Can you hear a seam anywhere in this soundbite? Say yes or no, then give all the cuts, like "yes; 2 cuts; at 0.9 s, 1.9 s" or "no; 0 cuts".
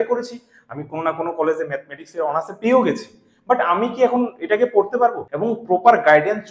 yes; 1 cut; at 5.3 s